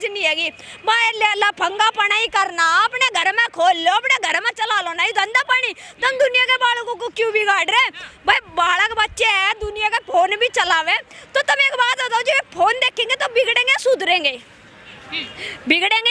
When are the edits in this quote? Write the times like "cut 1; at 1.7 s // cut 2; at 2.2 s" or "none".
none